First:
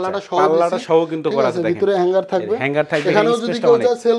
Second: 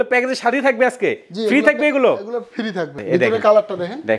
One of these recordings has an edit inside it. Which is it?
second; 1 cut; at 3.0 s

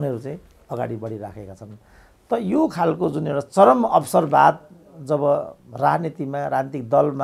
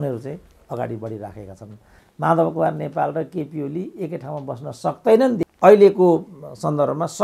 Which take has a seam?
second; 2 cuts; at 2.1 s, 5.5 s

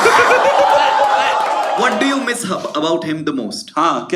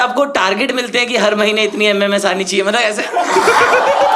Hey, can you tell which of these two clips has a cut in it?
first; 1 cut; at 1.8 s

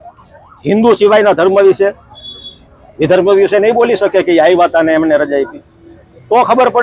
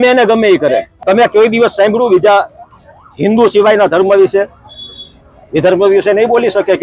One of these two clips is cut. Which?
second; 1 cut; at 0.9 s

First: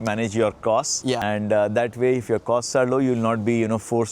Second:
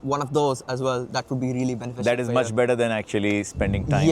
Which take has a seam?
first; 1 cut; at 1.2 s

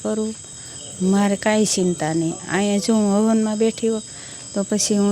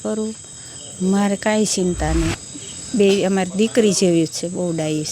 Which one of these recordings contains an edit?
second; 1 cut; at 2.4 s

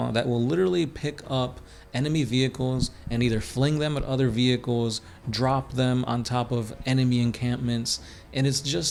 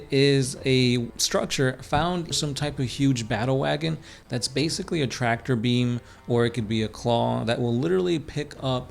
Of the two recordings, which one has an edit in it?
second; 2 cuts; at 1.2 s, 2.3 s

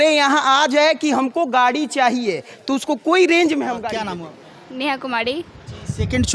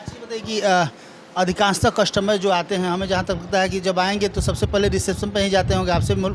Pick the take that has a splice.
first; 1 cut; at 4.0 s

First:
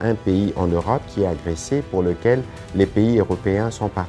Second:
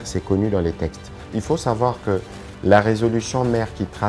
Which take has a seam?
second; 1 cut; at 1.2 s

